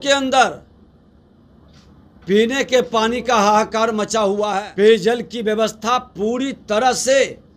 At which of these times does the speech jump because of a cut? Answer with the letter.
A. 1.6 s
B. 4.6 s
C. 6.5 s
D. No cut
B